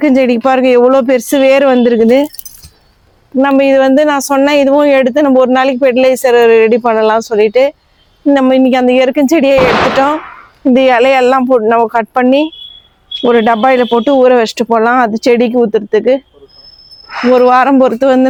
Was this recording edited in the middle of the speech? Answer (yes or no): no